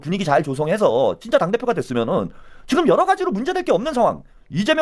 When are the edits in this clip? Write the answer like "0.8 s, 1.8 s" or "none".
none

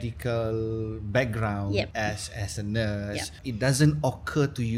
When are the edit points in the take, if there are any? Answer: 1.9 s, 3.4 s

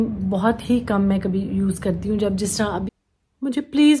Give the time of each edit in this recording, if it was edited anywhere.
2.8 s

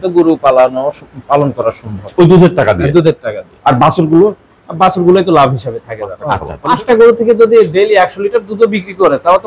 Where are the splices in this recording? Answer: none

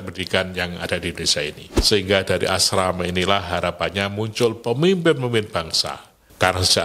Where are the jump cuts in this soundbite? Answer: 1.7 s

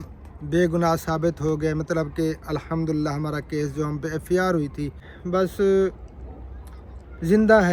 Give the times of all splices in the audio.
5.1 s

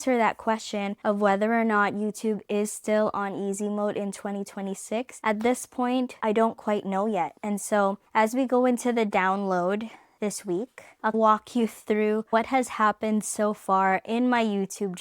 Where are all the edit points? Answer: 0.9 s, 5.1 s, 6.1 s, 7.4 s, 10.5 s

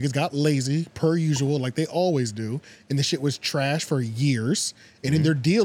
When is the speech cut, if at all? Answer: none

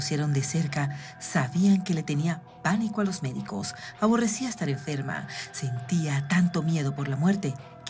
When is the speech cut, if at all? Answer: none

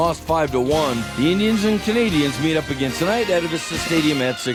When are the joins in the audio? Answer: none

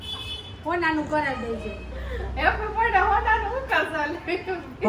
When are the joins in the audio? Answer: none

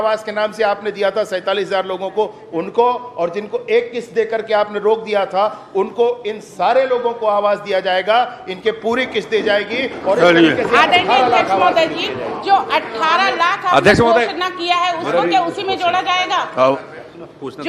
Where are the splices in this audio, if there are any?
none

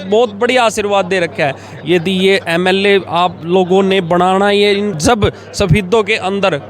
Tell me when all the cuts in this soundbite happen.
4.9 s

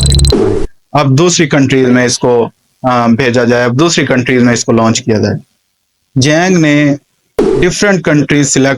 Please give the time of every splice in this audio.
none

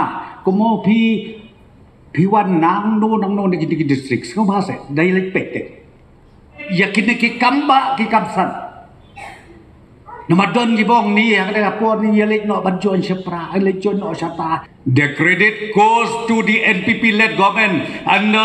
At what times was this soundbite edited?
6.6 s, 14.7 s

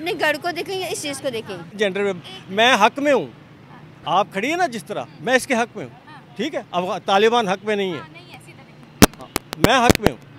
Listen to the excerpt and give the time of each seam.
1.8 s

